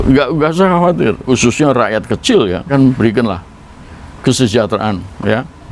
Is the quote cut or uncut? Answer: cut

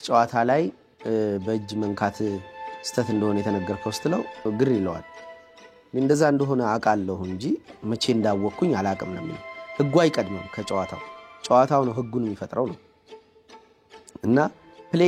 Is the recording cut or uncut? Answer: cut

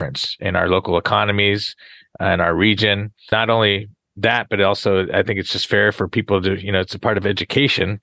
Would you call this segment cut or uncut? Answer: cut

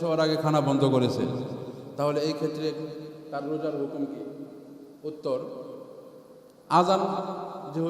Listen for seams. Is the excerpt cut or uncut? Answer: uncut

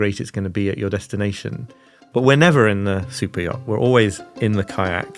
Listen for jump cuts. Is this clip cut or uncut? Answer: cut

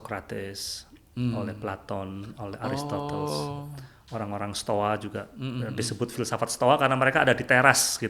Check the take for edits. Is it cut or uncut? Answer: uncut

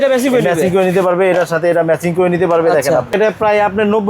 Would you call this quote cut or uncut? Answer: cut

